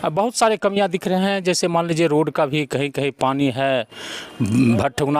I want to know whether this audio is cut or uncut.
uncut